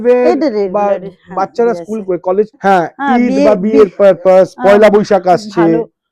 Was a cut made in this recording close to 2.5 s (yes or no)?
yes